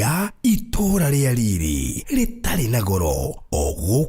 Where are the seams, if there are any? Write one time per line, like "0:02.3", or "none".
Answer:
0:01.0